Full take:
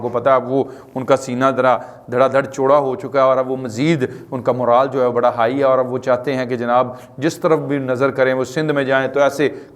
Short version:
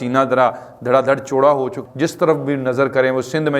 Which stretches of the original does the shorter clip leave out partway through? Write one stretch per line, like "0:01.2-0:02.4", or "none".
0:03.0-0:07.0